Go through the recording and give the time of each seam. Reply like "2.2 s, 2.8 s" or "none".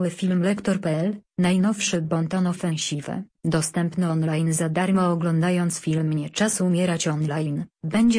0.9 s

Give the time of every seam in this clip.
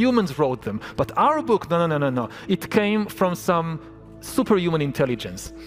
none

